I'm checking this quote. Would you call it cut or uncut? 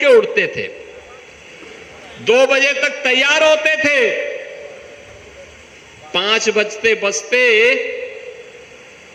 uncut